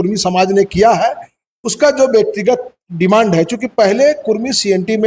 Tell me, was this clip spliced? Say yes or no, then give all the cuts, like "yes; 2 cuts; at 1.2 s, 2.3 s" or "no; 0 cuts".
no; 0 cuts